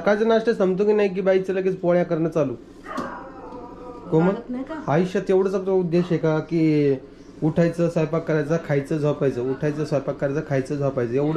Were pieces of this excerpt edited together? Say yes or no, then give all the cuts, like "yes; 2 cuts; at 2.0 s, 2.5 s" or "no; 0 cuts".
no; 0 cuts